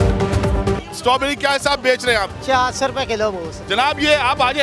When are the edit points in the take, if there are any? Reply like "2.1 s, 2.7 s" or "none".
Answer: 0.9 s, 2.4 s, 3.5 s